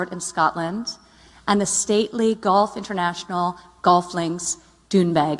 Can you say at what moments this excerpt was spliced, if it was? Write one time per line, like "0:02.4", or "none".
0:02.7